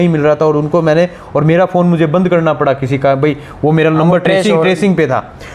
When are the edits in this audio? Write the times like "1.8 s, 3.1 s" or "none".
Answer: none